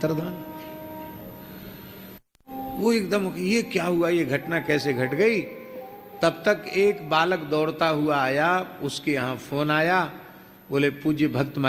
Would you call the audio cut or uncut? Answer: uncut